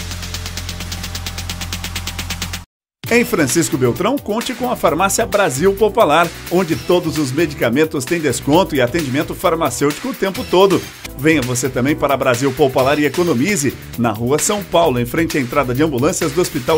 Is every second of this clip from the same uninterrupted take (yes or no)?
no